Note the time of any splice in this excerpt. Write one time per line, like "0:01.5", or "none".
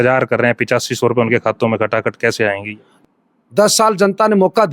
0:02.9